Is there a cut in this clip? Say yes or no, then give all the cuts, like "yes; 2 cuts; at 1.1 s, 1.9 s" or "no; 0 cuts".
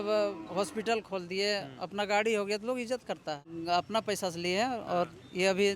yes; 1 cut; at 3.5 s